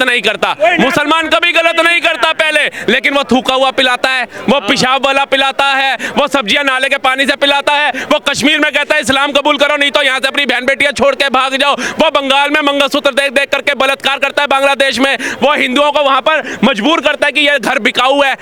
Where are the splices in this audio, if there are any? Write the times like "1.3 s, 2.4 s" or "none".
none